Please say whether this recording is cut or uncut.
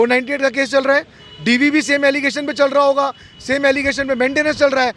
uncut